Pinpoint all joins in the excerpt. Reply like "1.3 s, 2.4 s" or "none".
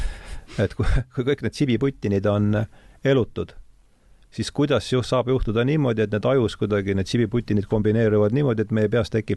none